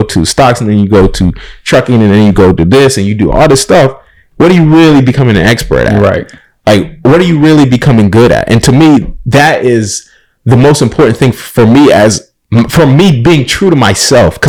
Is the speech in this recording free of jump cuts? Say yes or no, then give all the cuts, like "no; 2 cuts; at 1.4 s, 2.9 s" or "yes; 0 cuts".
yes; 0 cuts